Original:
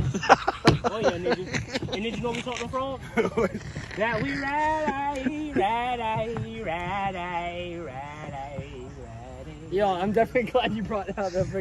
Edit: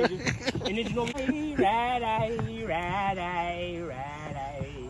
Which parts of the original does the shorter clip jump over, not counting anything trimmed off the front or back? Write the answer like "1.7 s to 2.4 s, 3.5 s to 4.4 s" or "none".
2.4 s to 5.1 s